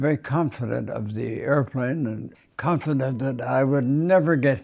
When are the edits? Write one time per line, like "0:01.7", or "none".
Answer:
0:02.3